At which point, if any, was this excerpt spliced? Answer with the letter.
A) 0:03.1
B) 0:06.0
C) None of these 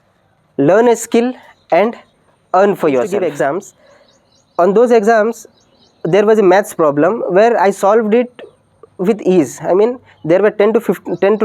A